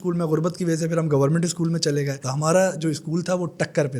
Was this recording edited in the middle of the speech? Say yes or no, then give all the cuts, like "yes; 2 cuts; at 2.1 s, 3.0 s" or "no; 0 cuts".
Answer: yes; 1 cut; at 2.2 s